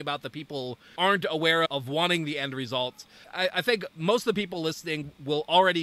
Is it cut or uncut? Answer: cut